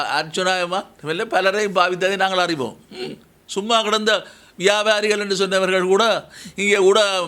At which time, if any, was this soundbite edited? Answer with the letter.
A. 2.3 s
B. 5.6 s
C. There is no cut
C